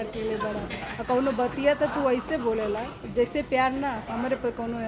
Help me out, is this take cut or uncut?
uncut